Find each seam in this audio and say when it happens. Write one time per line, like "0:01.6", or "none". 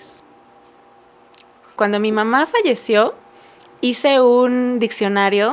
0:01.7